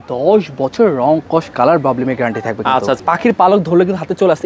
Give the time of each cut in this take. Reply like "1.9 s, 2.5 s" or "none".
3.0 s

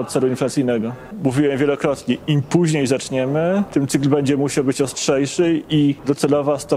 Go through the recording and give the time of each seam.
1.1 s, 3.7 s, 6.0 s

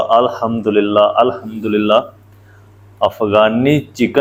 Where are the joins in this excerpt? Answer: none

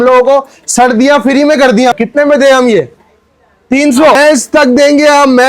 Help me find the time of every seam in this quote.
1.9 s, 4.2 s

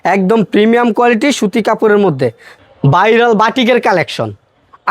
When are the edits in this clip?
2.5 s

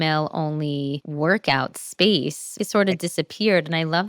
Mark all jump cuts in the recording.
1.0 s, 2.6 s

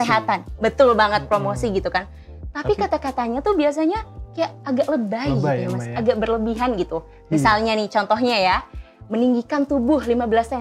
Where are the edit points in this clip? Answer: none

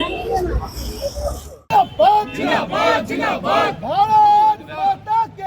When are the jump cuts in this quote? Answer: none

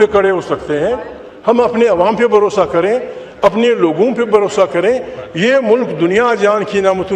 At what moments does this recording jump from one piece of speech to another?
none

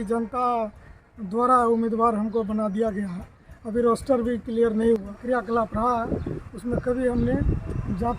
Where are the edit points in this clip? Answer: 5.1 s

